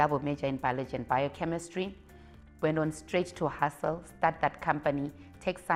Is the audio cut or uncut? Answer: uncut